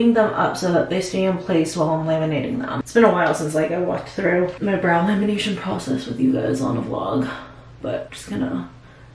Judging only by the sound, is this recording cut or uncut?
uncut